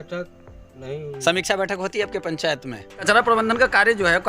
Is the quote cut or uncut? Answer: cut